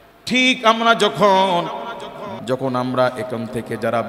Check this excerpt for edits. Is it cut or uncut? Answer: cut